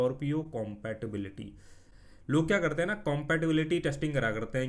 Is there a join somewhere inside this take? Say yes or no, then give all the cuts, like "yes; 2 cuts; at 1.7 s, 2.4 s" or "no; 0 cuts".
no; 0 cuts